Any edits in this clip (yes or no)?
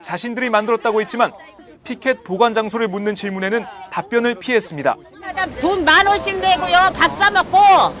yes